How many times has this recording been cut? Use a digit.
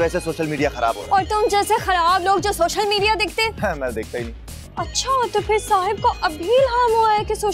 0